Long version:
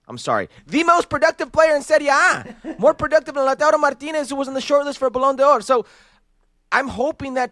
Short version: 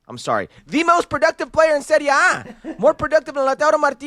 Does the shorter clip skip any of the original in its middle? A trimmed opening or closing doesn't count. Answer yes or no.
no